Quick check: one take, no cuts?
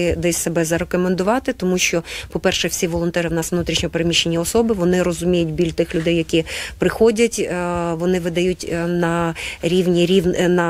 yes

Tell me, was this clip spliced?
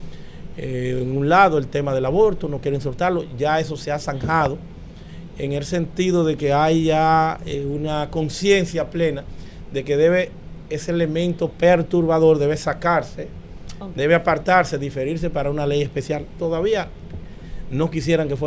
no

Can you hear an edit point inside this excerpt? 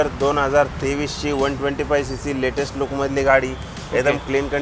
no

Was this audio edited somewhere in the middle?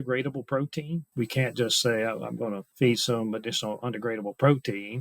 yes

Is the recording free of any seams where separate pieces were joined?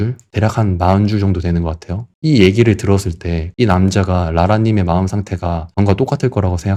yes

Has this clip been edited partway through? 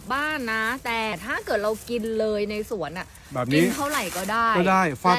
yes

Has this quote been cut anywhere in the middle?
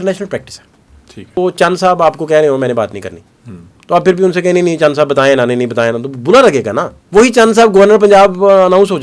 yes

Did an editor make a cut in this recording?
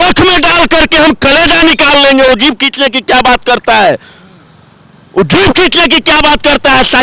no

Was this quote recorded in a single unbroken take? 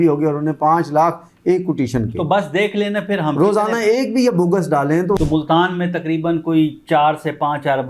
no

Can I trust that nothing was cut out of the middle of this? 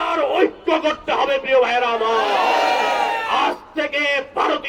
yes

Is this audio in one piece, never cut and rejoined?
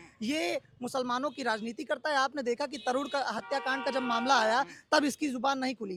yes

